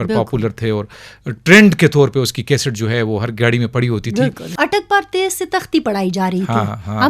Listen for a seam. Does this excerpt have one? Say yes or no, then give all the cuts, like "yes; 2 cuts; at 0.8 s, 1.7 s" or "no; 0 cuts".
yes; 1 cut; at 4.4 s